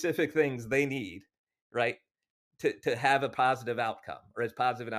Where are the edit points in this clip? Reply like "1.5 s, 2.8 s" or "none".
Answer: none